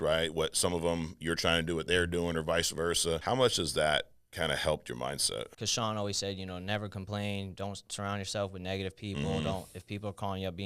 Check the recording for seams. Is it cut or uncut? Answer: cut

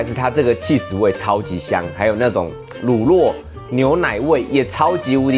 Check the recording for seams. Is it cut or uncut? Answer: uncut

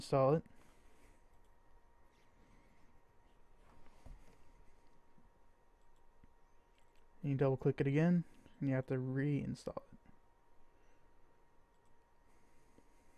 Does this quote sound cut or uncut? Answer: uncut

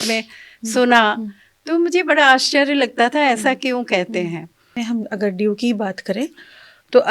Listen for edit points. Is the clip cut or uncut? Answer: cut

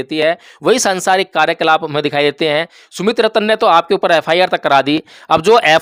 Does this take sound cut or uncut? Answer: uncut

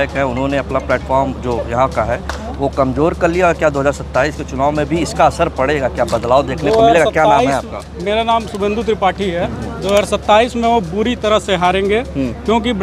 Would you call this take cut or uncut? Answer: uncut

